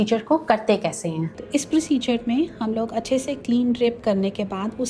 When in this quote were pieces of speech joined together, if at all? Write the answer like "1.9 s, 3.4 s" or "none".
none